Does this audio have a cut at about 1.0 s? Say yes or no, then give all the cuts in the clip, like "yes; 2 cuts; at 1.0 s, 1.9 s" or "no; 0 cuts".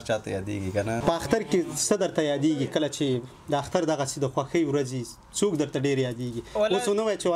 yes; 1 cut; at 1.0 s